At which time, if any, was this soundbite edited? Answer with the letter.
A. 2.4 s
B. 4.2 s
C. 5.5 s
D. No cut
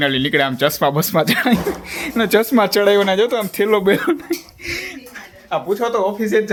D